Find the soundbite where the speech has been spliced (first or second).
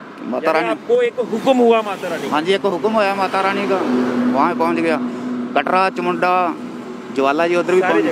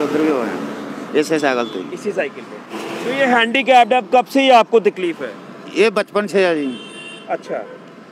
second